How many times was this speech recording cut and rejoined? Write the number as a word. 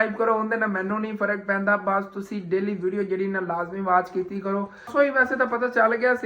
one